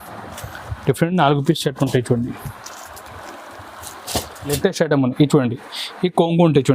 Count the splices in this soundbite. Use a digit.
1